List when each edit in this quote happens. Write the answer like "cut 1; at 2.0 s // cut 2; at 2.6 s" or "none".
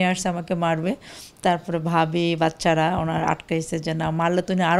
none